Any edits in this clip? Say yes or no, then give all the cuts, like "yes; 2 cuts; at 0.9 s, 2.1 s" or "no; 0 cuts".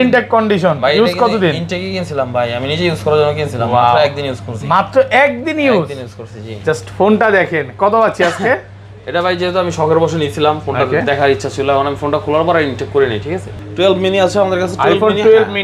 yes; 1 cut; at 13.6 s